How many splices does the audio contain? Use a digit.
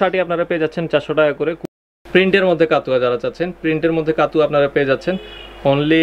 1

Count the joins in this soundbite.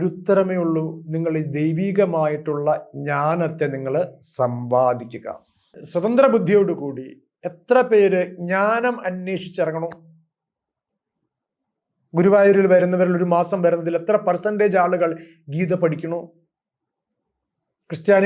1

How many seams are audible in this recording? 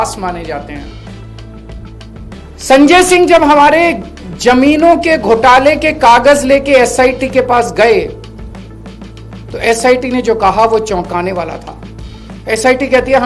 1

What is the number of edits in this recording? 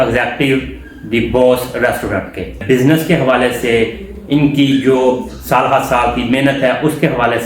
1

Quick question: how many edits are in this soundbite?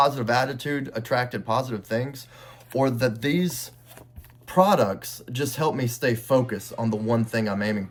0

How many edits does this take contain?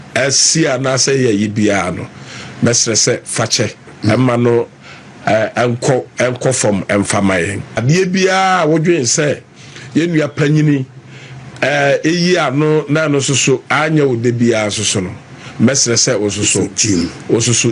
1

